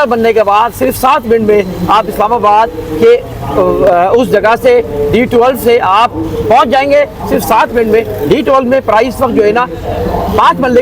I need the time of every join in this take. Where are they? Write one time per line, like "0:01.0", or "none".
none

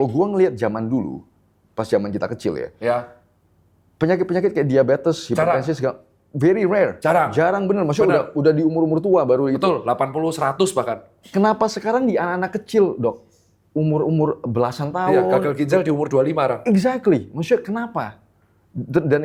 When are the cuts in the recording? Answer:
none

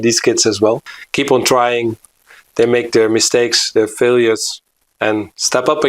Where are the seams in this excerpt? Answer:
0:01.0

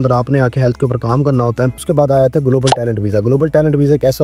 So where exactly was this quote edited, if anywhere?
0:01.8

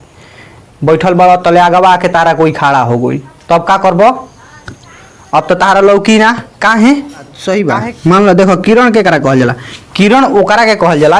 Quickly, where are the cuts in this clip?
0:07.4

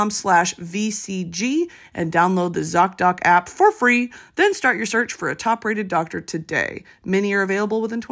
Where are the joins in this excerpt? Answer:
none

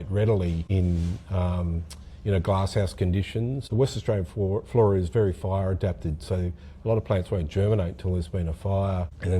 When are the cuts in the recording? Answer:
0:03.7

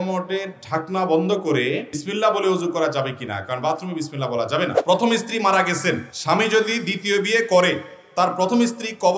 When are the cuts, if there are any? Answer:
0:01.9
0:04.8
0:06.1

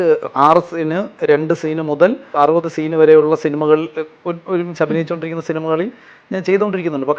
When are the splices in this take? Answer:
0:02.4

